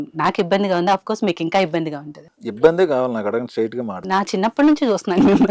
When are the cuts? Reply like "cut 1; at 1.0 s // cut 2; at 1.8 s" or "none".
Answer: cut 1; at 2.6 s